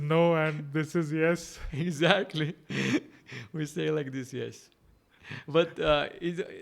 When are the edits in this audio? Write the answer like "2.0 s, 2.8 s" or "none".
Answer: none